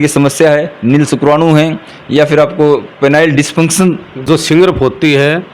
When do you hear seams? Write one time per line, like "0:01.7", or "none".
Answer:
0:04.2

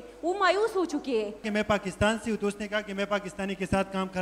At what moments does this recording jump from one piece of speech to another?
0:01.4

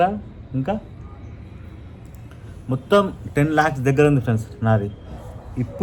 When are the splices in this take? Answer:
none

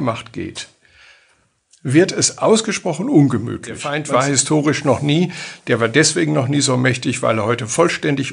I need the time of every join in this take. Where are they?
0:03.9

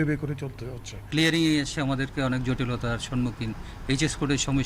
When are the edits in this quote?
none

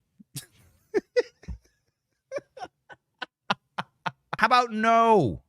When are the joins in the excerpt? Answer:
0:04.3

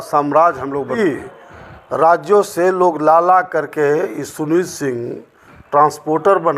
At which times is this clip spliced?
0:01.0

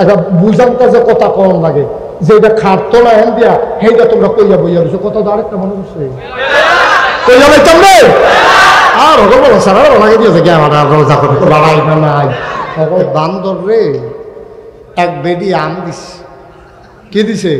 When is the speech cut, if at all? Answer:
0:13.1

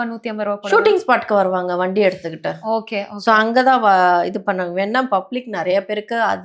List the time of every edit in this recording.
none

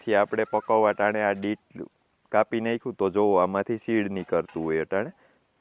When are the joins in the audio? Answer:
none

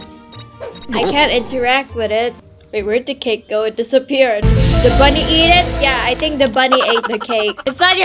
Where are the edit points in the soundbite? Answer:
0:01.0

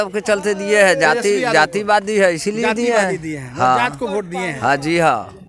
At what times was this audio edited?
none

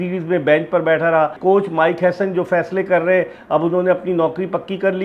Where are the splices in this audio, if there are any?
0:01.4

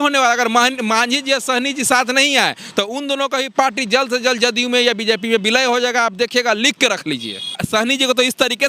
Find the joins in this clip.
0:07.6

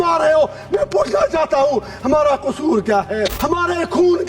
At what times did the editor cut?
0:03.4

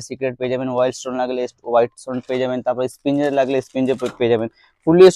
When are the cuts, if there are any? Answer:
none

